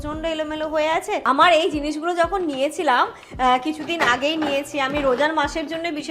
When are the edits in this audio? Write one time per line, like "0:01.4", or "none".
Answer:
0:01.2